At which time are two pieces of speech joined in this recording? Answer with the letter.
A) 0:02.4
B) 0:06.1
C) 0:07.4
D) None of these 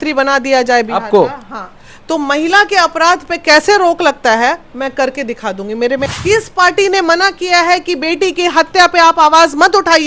B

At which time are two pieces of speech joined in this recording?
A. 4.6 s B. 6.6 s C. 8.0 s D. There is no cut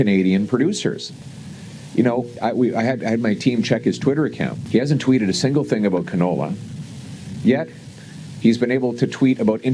A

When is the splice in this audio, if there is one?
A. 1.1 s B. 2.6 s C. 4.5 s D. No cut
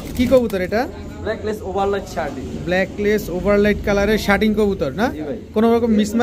D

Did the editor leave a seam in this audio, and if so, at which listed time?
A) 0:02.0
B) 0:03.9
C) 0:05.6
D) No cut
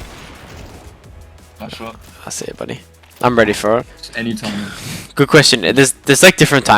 B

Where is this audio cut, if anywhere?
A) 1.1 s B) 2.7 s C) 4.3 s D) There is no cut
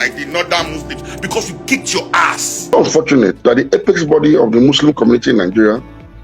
B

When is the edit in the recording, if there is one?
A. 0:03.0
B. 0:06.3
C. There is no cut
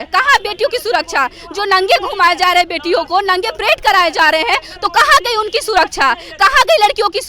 C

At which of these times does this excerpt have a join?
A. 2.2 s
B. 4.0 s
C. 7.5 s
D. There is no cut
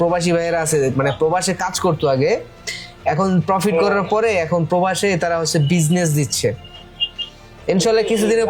D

